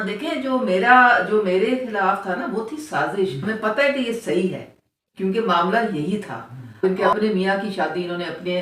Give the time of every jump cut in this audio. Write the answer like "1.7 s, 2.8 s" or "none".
3.4 s, 6.8 s